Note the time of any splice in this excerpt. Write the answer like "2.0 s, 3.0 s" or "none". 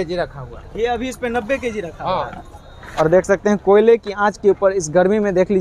2.8 s